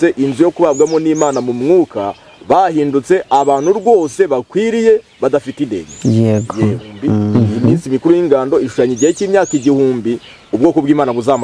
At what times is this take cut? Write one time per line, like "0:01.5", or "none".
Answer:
0:07.3